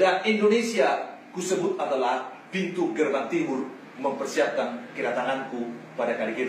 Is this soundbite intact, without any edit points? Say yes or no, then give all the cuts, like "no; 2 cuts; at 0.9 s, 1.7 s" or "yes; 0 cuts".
yes; 0 cuts